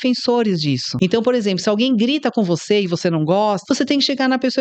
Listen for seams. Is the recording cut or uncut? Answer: cut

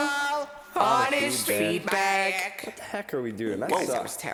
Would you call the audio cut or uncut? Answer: uncut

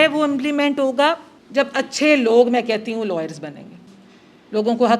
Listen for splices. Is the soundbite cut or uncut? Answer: cut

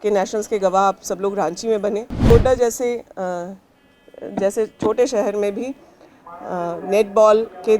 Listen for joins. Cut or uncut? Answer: cut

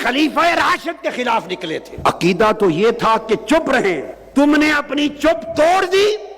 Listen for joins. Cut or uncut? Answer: cut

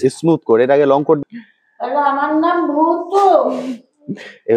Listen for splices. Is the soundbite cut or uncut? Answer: cut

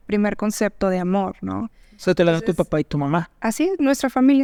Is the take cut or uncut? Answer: uncut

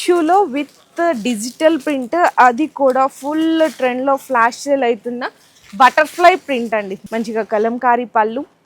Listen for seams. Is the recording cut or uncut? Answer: cut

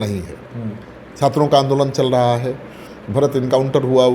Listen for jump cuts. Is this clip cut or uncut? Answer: uncut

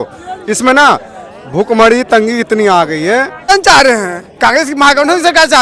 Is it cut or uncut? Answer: cut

